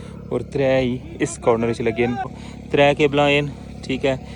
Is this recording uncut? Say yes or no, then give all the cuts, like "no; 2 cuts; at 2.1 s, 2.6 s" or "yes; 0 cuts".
no; 1 cut; at 2.3 s